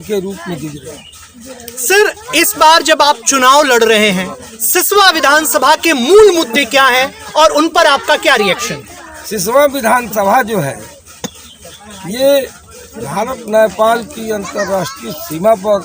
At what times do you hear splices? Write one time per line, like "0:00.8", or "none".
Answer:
none